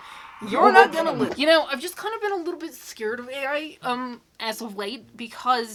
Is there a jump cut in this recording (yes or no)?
no